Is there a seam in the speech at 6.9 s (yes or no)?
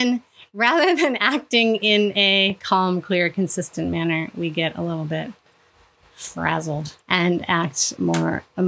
yes